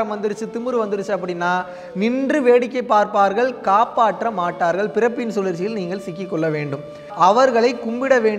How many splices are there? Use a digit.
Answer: 1